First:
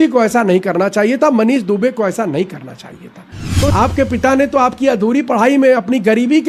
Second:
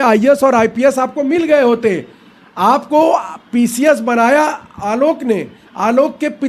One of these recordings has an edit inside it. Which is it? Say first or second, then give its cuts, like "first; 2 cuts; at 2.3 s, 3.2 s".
first; 1 cut; at 3.7 s